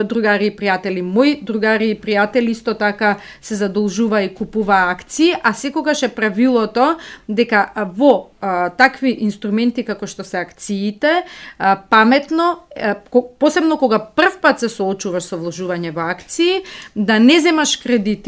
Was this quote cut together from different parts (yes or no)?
no